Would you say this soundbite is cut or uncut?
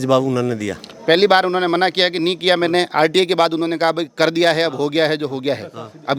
uncut